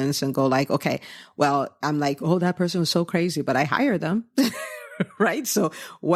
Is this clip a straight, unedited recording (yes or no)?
yes